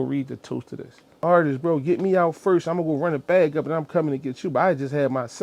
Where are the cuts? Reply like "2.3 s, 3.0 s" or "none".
1.2 s